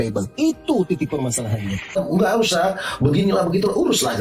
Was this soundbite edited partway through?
yes; 1 cut; at 1.9 s

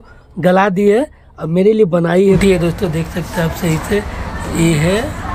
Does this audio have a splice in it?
yes; 1 cut; at 2.4 s

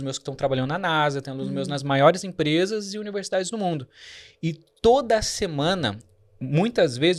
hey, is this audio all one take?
yes; 0 cuts

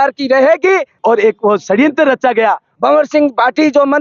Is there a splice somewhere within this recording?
yes; 2 cuts; at 0.9 s, 2.7 s

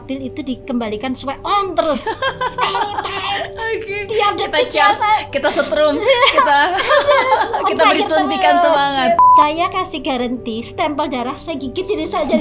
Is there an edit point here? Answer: yes; 1 cut; at 9.3 s

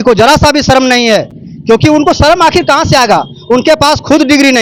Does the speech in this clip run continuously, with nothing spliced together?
yes; 0 cuts

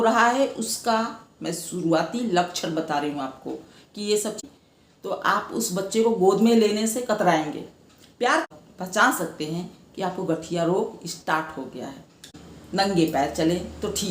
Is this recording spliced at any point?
yes; 3 cuts; at 4.4 s, 8.5 s, 12.3 s

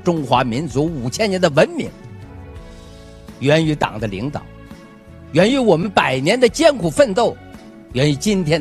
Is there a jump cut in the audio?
yes; 2 cuts; at 1.9 s, 3.4 s

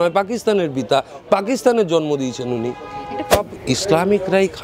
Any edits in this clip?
yes; 1 cut; at 3.3 s

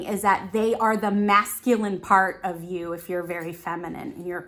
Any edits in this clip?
no; 0 cuts

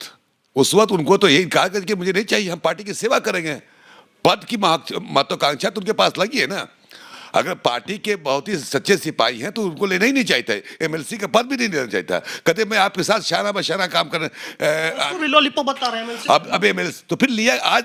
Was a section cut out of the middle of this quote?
no; 0 cuts

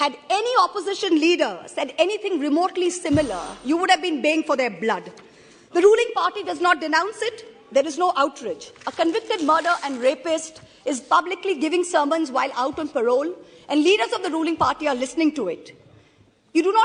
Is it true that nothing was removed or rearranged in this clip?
yes; 0 cuts

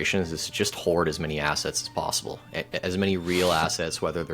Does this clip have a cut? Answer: no; 0 cuts

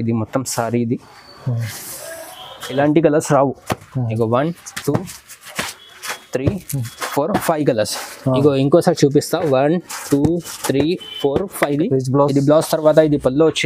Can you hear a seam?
yes; 2 cuts; at 2.8 s, 11.7 s

